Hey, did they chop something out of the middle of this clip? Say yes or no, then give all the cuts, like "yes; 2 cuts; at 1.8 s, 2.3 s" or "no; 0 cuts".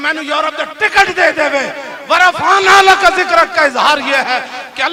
no; 0 cuts